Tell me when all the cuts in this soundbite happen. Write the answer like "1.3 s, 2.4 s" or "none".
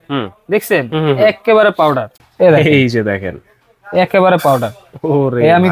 2.1 s